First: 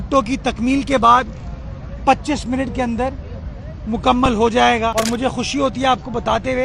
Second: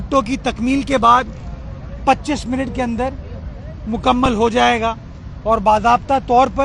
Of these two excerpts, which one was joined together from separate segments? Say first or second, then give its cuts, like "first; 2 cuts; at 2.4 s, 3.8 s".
first; 1 cut; at 4.9 s